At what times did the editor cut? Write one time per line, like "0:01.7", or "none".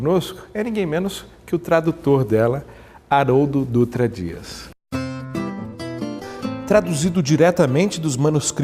0:05.6